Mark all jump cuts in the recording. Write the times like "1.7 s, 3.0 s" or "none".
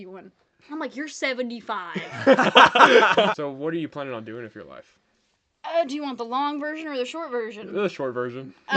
3.4 s